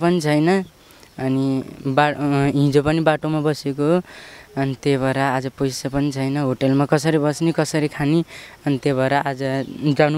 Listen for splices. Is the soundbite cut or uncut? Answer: uncut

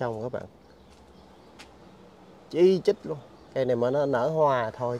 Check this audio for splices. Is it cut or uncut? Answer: uncut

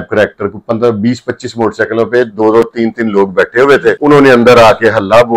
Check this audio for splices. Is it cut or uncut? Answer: uncut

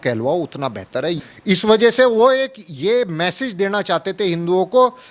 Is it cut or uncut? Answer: cut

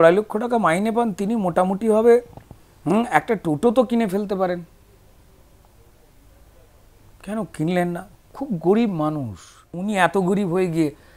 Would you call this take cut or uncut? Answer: cut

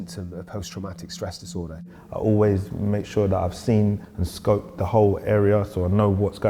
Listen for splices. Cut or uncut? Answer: cut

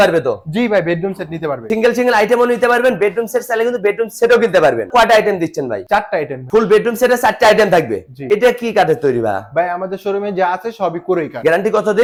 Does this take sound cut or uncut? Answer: uncut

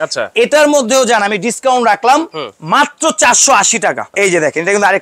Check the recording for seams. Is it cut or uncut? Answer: cut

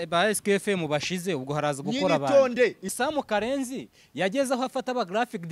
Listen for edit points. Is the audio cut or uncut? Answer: cut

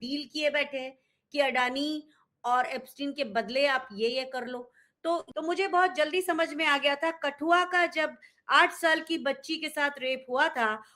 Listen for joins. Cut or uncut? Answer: cut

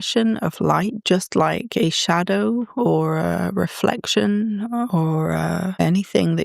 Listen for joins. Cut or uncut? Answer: cut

